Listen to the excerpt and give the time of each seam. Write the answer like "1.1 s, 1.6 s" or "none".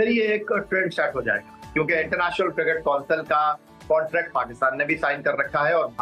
none